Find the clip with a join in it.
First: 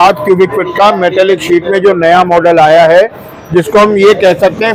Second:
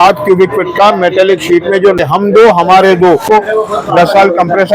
second; 2 cuts; at 1.7 s, 3.2 s

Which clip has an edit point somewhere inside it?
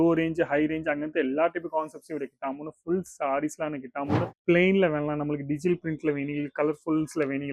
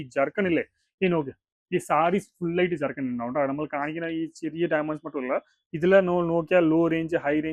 first; 1 cut; at 4.3 s

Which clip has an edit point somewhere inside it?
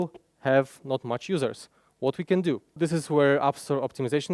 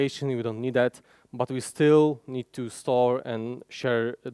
first; 1 cut; at 2.8 s

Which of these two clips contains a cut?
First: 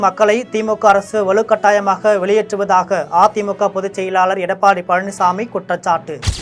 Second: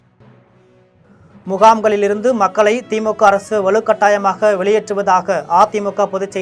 second; 1 cut; at 1.5 s

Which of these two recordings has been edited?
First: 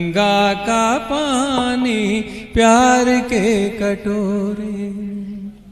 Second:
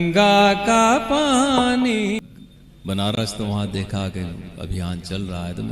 second; 1 cut; at 2.3 s

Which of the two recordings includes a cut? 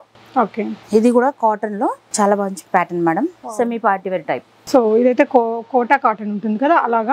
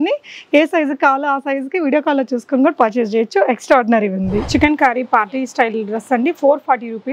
second; 1 cut; at 4.4 s

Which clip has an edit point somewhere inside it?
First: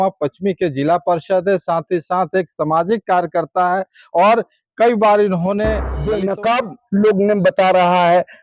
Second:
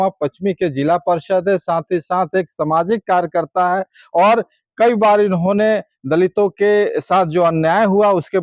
first; 1 cut; at 5.9 s

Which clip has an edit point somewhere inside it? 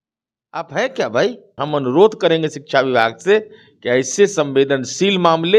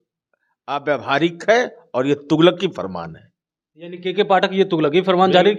first; 1 cut; at 1.6 s

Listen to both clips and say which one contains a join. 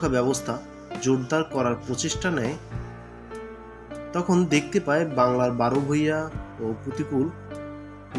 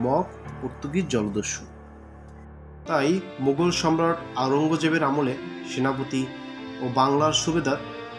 second; 1 cut; at 2.8 s

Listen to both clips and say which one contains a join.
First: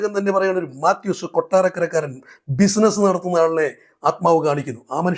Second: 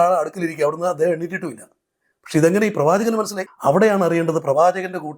second; 1 cut; at 3.4 s

